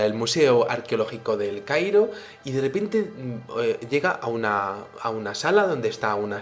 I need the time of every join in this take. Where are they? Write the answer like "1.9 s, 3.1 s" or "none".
3.8 s